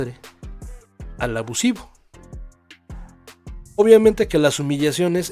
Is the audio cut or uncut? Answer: uncut